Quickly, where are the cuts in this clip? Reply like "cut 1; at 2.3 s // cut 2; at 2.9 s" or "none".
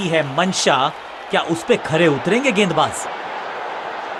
none